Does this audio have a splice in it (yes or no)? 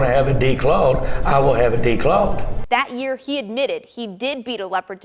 yes